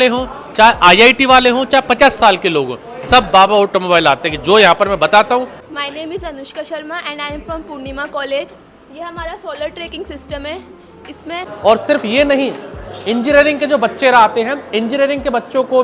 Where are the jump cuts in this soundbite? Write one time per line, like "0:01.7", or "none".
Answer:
0:05.6
0:11.4